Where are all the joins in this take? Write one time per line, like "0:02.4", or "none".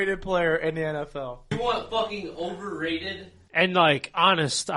0:01.5